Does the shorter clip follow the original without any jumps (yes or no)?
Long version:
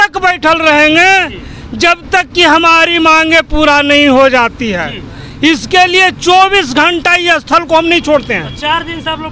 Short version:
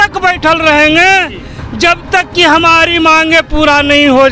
yes